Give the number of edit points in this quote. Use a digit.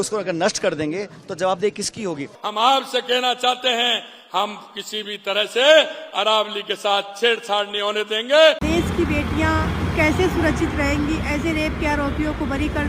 2